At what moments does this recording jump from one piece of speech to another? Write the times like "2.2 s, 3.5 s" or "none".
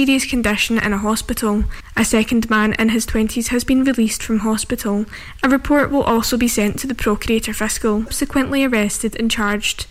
8.1 s

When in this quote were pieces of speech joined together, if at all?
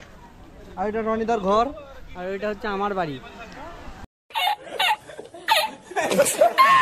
none

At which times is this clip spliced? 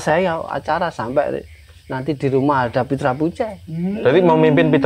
none

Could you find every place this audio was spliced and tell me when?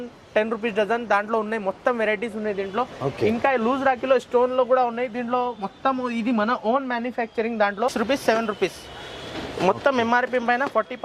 7.9 s

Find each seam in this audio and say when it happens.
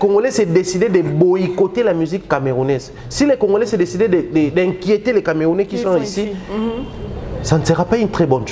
none

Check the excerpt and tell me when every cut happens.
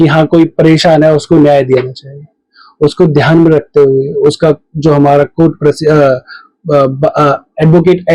none

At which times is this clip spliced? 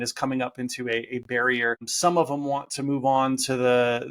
1.9 s

